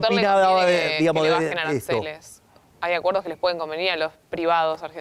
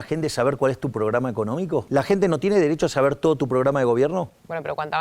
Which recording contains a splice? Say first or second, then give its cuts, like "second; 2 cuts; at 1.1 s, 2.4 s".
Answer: second; 1 cut; at 1.9 s